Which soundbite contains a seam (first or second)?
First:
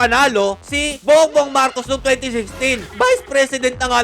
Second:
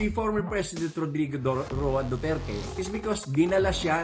first